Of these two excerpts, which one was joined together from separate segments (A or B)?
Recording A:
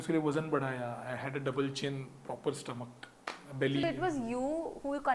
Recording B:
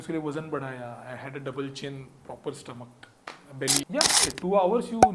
B